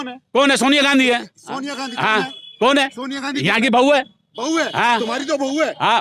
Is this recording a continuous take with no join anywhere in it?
yes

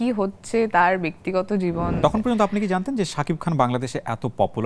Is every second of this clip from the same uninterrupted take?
no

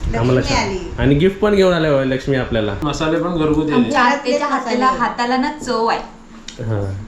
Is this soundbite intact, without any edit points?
no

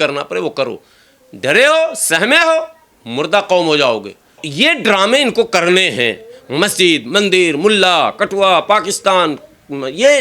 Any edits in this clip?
yes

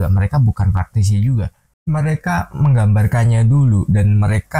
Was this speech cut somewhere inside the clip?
yes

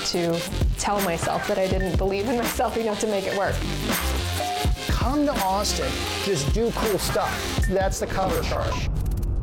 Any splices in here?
no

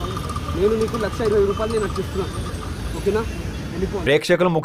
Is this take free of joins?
yes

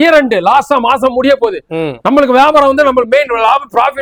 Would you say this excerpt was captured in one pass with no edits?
yes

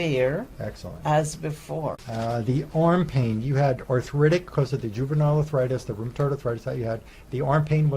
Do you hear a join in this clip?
yes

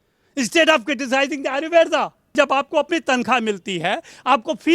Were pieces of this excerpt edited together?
yes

